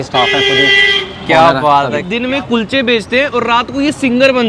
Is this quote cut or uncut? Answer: cut